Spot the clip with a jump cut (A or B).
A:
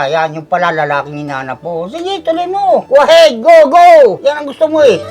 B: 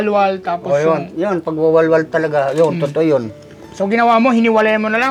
A